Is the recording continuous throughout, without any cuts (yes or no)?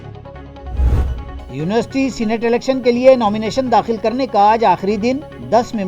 no